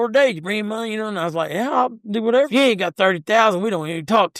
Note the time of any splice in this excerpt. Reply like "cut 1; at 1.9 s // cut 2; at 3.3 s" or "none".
cut 1; at 2.5 s